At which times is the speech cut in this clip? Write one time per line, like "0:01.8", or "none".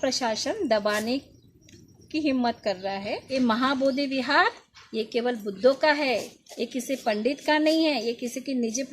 0:03.2